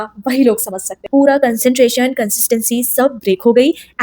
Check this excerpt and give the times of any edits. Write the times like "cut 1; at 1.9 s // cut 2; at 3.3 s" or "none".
cut 1; at 1.0 s